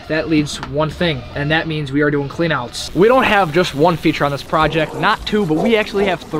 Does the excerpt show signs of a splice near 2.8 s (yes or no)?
yes